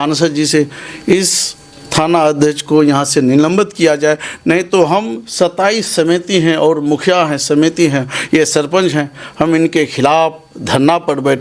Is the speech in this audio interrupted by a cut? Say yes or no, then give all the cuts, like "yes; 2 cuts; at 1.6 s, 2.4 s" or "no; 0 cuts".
no; 0 cuts